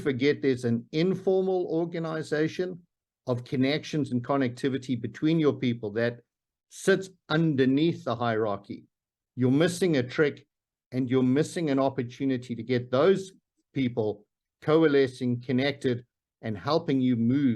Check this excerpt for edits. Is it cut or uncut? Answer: uncut